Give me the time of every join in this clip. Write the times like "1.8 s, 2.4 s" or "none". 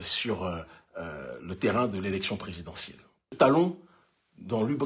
3.3 s